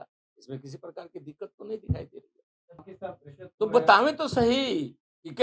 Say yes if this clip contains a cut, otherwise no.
yes